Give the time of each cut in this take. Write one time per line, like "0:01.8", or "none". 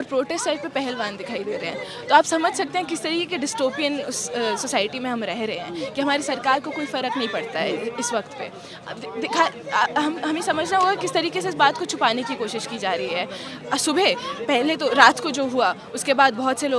none